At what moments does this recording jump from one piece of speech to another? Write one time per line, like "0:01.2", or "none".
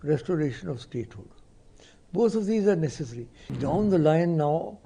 0:03.5